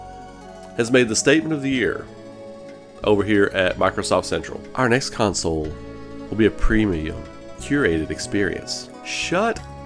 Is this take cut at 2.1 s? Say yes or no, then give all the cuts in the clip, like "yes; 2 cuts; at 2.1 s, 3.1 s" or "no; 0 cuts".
no; 1 cut; at 4.6 s